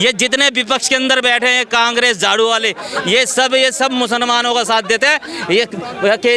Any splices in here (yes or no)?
no